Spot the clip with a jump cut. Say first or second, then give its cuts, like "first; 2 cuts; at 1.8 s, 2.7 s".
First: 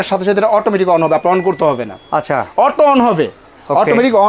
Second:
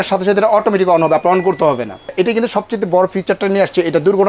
second; 1 cut; at 2.1 s